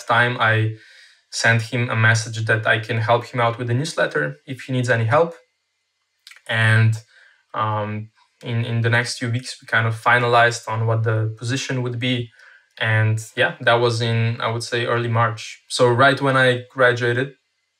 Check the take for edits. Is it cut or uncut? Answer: uncut